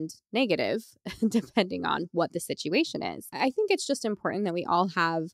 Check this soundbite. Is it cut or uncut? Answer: cut